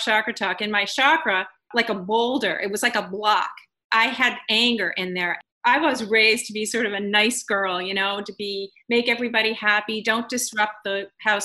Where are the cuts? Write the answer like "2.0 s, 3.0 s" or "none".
none

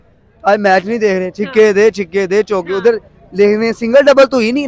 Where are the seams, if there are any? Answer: none

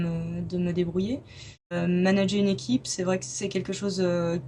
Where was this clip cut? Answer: 1.8 s

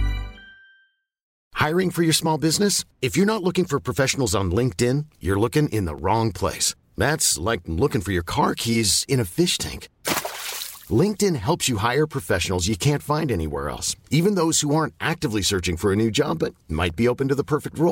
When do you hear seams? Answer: 1.4 s

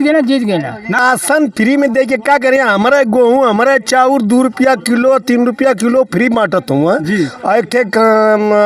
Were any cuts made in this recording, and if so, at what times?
1.0 s

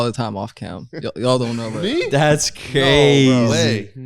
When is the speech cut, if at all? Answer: none

